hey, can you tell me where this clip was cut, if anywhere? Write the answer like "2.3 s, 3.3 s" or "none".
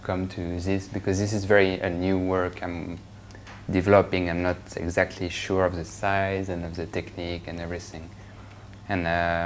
8.0 s

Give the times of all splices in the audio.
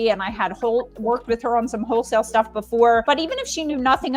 3.0 s

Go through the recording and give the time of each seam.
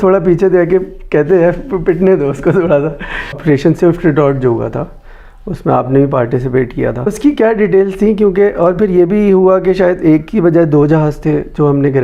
3.4 s, 7.1 s

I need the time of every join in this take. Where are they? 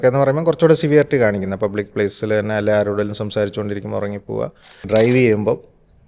4.9 s

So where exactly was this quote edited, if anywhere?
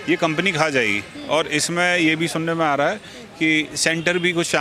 none

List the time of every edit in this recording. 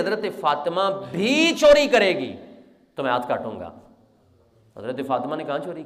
none

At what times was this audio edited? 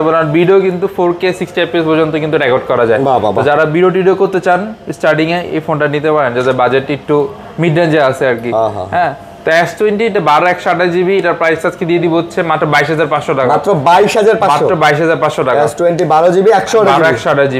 none

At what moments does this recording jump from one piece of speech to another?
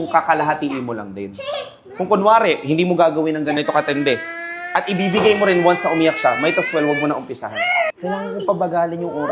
3.6 s, 7.9 s

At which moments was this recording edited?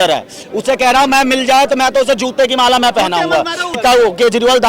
3.7 s

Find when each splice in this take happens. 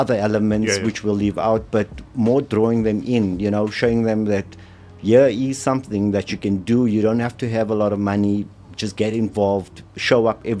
none

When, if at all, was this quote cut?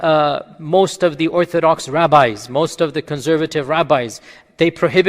none

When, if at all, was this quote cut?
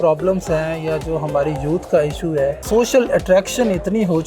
2.6 s

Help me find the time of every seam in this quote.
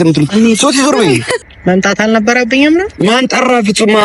1.3 s

